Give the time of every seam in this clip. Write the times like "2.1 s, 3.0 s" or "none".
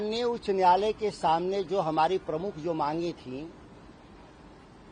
none

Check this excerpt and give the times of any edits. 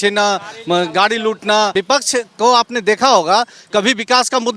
1.7 s

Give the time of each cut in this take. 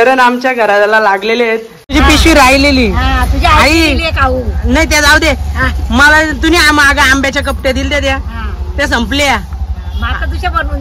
1.7 s

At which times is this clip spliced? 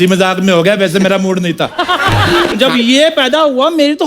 2.5 s

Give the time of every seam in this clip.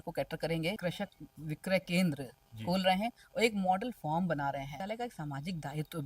0.8 s, 4.8 s

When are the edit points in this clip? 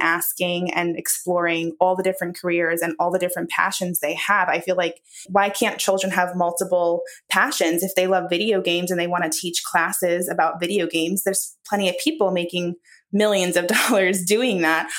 5.3 s

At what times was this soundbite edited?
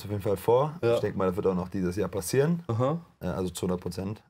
none

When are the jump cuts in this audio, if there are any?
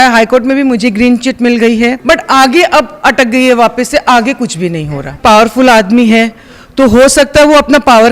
2.0 s, 5.1 s

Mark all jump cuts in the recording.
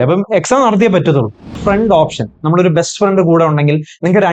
1.6 s

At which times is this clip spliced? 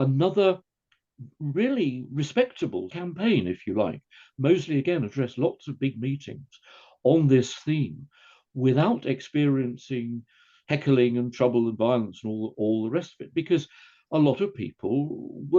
2.9 s

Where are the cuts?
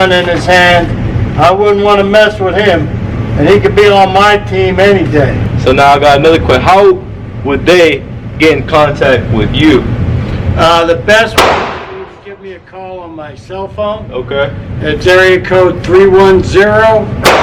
5.5 s

